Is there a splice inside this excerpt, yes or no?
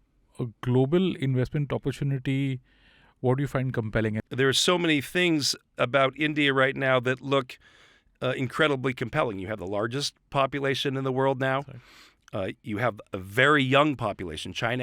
yes